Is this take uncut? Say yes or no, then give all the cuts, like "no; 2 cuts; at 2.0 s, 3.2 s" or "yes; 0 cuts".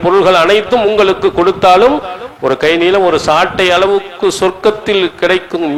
yes; 0 cuts